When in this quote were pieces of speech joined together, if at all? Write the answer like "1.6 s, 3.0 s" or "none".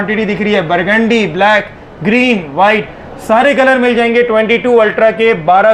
none